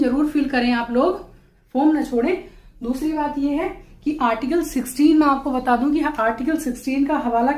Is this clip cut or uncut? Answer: uncut